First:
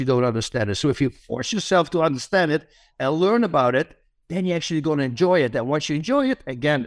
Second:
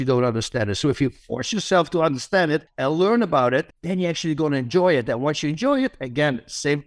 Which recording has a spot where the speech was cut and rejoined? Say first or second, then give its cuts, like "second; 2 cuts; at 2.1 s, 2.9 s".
second; 2 cuts; at 2.7 s, 3.8 s